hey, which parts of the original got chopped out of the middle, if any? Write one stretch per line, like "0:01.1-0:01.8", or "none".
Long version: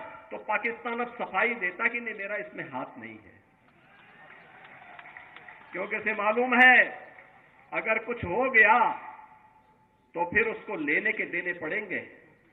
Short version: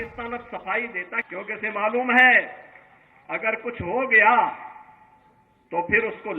0:01.9-0:05.7